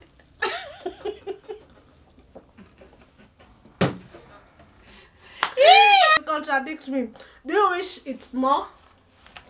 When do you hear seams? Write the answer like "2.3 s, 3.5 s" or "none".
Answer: 6.2 s